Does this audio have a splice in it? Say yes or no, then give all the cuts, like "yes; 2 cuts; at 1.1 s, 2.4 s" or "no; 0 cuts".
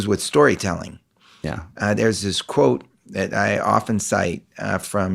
no; 0 cuts